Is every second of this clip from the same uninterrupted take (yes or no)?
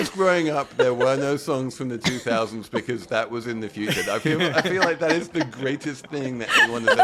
yes